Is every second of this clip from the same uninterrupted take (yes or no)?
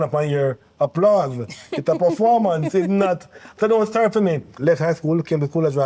no